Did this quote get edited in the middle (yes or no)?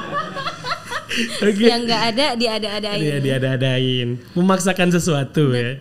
no